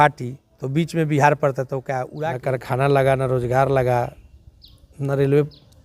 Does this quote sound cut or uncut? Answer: cut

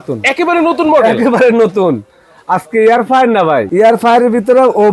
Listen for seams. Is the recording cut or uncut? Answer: cut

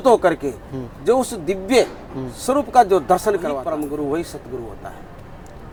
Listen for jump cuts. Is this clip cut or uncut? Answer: uncut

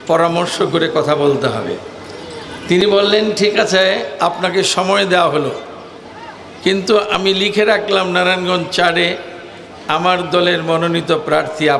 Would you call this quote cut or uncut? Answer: uncut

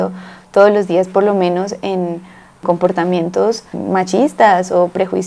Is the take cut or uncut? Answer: uncut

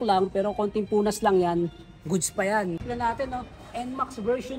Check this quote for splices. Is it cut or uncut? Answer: cut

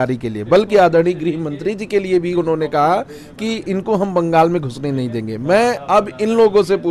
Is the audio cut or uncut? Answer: uncut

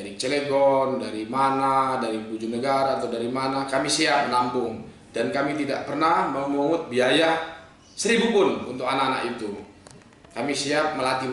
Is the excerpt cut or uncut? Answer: uncut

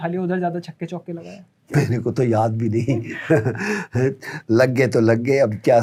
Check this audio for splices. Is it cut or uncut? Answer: uncut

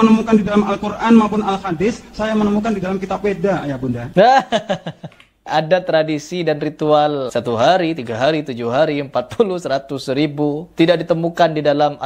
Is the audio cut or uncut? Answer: cut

